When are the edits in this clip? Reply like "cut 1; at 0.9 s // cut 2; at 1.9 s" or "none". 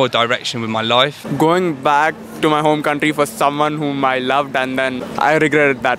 cut 1; at 1.2 s // cut 2; at 5.0 s